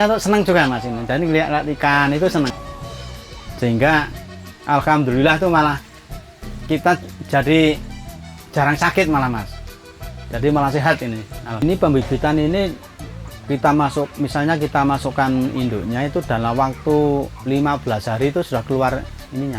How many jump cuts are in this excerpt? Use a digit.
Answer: 2